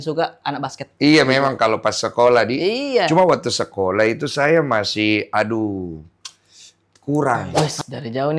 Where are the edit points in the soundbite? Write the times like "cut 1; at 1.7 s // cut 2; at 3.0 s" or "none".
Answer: cut 1; at 7.5 s